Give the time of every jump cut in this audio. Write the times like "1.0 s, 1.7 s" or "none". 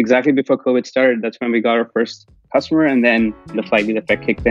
3.6 s